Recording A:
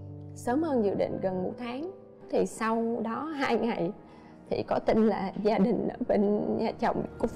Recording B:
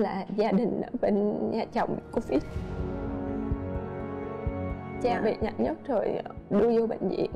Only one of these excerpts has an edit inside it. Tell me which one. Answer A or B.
A